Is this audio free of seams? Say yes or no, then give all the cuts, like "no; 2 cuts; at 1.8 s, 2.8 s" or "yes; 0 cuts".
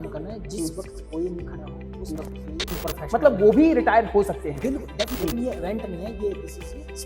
no; 2 cuts; at 2.7 s, 5.1 s